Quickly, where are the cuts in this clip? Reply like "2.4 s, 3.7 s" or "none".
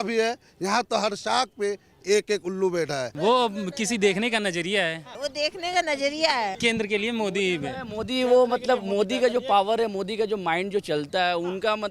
3.1 s, 5.1 s, 6.6 s

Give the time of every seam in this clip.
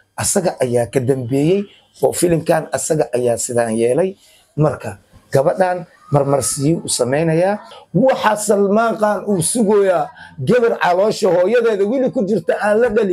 7.7 s

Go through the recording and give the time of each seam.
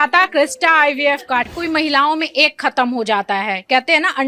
1.5 s

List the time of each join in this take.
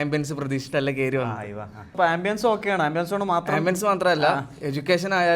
1.9 s

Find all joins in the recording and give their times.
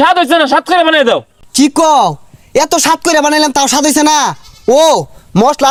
none

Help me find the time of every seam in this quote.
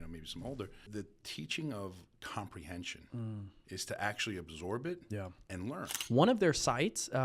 0.9 s, 6.0 s

